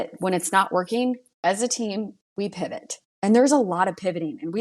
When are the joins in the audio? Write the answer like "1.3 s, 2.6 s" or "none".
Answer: 2.2 s